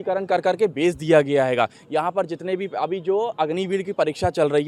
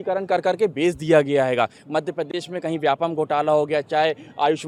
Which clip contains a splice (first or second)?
second